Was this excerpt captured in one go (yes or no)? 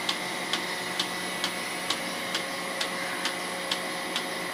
yes